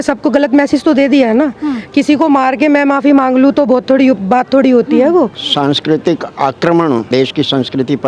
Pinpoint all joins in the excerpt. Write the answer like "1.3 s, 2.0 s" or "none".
5.4 s, 7.1 s